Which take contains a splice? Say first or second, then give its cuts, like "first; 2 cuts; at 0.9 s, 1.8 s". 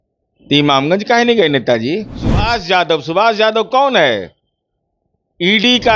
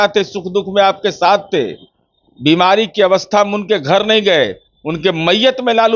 first; 1 cut; at 2.4 s